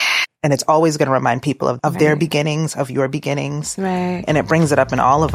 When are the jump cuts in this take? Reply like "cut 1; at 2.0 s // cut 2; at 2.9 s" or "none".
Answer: cut 1; at 1.8 s // cut 2; at 4.2 s